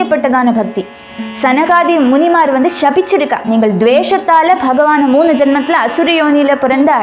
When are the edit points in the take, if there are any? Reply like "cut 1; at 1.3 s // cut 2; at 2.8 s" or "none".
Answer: none